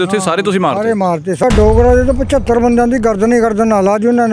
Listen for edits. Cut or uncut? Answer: cut